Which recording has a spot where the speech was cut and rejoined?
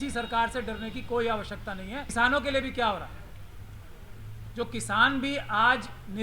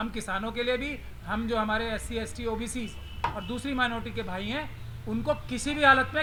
first; 1 cut; at 2.0 s

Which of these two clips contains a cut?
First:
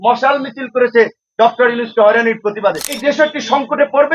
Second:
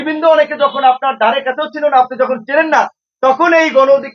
first; 1 cut; at 3.0 s

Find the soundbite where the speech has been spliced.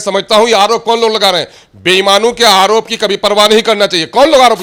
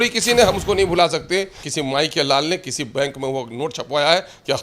second; 1 cut; at 1.6 s

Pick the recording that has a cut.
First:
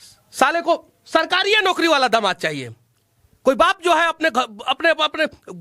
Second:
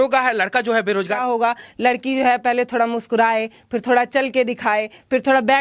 second; 1 cut; at 1.2 s

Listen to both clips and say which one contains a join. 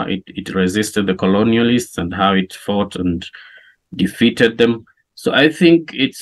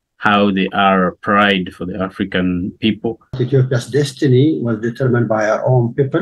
second; 1 cut; at 3.4 s

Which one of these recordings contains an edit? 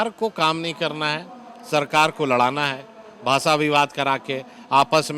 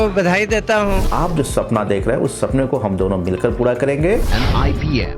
second; 2 cuts; at 1.1 s, 4.3 s

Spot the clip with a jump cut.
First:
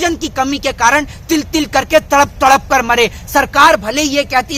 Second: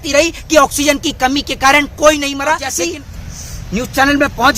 second; 1 cut; at 2.9 s

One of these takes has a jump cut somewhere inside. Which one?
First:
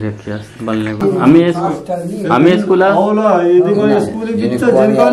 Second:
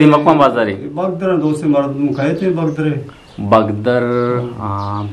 first; 1 cut; at 1.0 s

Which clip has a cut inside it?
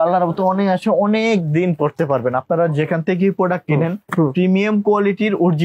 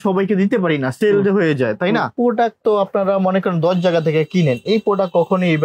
second; 1 cut; at 2.1 s

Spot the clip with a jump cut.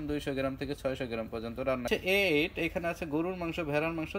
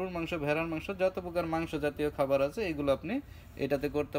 first; 1 cut; at 1.8 s

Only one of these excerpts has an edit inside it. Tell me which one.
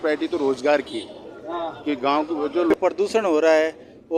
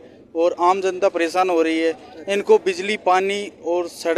first; 1 cut; at 2.7 s

